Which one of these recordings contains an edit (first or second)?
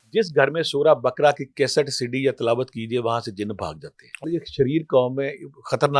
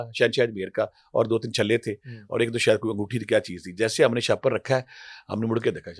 first